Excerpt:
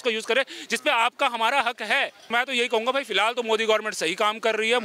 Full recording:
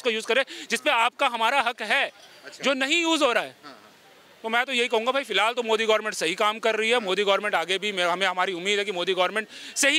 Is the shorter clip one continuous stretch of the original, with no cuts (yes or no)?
no